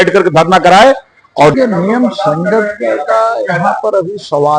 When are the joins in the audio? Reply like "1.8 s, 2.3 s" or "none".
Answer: 1.5 s